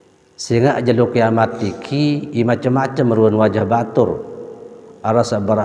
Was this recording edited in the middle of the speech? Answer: no; 0 cuts

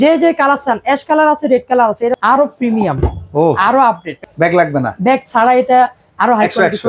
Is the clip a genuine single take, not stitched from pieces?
no; 2 cuts; at 2.2 s, 4.1 s

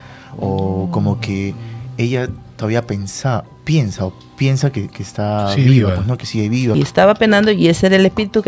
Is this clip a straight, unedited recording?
no; 1 cut; at 6.7 s

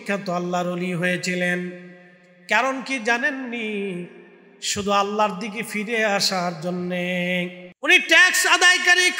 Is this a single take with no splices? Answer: no; 1 cut; at 7.7 s

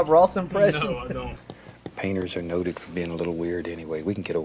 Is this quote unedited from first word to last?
yes; 0 cuts

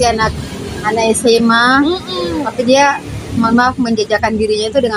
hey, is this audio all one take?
yes; 0 cuts

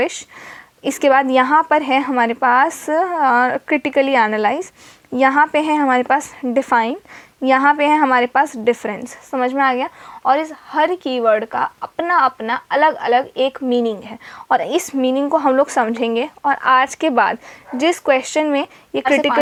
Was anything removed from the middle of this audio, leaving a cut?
no; 0 cuts

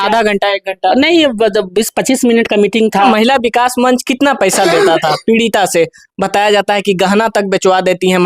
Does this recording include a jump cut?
yes; 1 cut; at 3.1 s

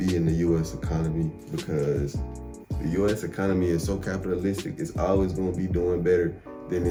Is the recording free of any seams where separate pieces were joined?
yes; 0 cuts

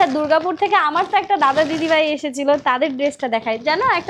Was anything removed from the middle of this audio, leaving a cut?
no; 0 cuts

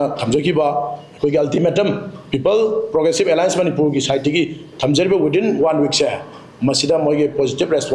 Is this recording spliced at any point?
no; 0 cuts

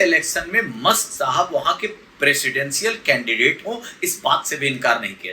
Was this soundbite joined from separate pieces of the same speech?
no; 0 cuts

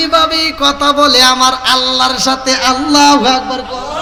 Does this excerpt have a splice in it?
no; 0 cuts

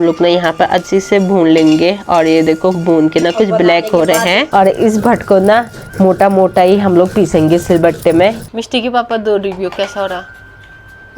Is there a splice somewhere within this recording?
yes; 2 cuts; at 4.4 s, 8.4 s

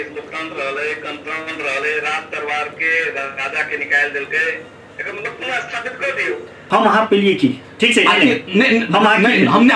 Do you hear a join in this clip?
yes; 1 cut; at 6.6 s

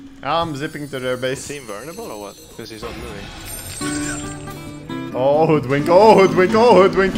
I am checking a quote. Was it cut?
no; 0 cuts

